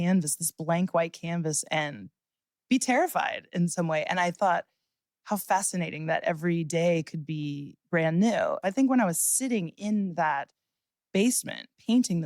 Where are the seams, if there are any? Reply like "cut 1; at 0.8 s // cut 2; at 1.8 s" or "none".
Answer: cut 1; at 8.6 s